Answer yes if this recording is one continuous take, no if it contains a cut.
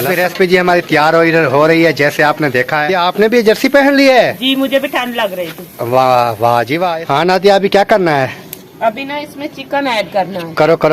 no